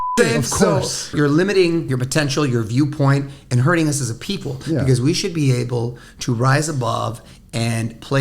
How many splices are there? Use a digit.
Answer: 2